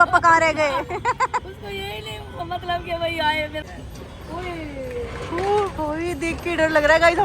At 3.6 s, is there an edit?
yes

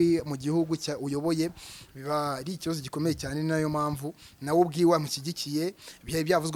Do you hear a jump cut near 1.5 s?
no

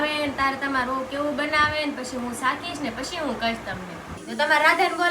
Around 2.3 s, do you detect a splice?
no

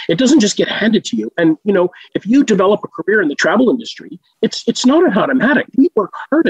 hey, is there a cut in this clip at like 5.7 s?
yes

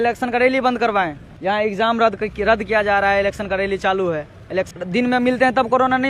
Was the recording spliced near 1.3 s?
yes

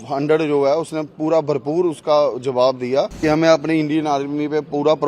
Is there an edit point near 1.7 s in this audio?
no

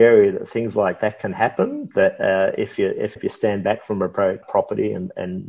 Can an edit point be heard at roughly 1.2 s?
no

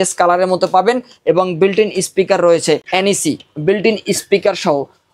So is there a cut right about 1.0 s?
no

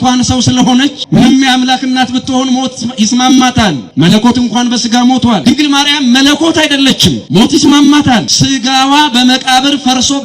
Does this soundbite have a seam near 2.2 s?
no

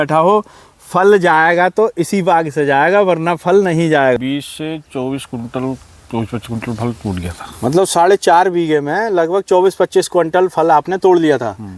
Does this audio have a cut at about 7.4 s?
no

